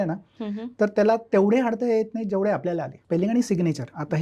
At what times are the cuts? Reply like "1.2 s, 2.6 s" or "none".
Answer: 3.0 s